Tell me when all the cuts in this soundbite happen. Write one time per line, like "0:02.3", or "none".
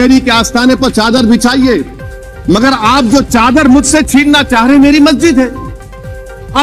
none